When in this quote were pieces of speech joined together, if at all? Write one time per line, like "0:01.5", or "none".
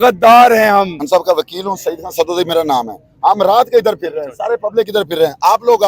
0:01.0